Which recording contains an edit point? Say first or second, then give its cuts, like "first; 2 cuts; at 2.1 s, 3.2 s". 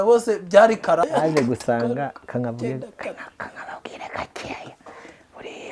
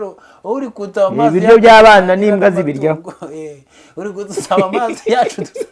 first; 1 cut; at 1.0 s